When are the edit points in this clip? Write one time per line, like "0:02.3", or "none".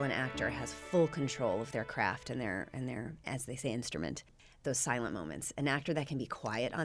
0:04.4